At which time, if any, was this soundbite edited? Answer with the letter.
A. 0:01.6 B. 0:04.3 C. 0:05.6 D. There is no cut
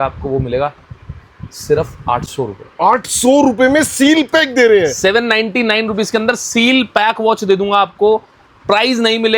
D